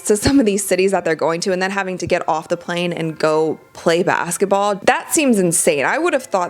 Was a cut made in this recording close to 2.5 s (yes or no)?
no